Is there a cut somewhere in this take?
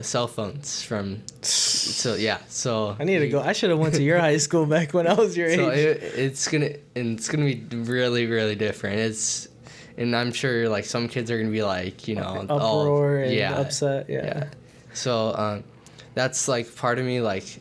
no; 0 cuts

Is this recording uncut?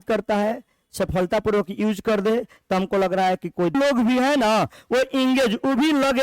no; 1 cut; at 3.7 s

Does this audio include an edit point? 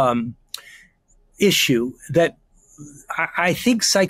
no; 0 cuts

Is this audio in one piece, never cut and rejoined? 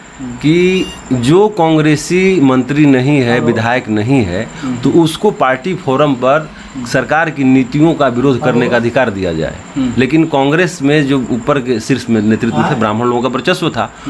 yes; 0 cuts

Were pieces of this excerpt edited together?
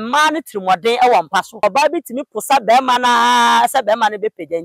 yes; 1 cut; at 1.6 s

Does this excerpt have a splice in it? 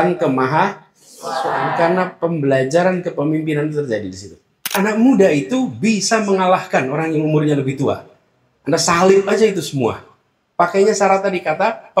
yes; 1 cut; at 4.7 s

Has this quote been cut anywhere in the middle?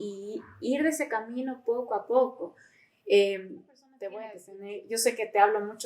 yes; 1 cut; at 3.9 s

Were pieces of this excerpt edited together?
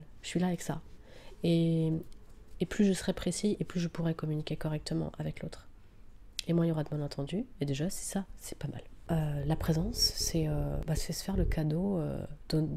yes; 1 cut; at 8.9 s

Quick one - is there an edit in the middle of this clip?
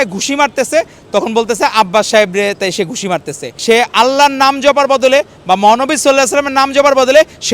yes; 1 cut; at 3.5 s

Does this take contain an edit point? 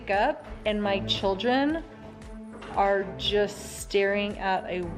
no; 0 cuts

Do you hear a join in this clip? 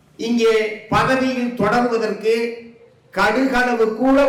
no; 0 cuts

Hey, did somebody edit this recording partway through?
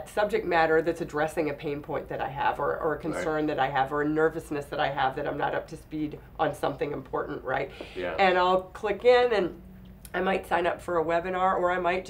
no; 0 cuts

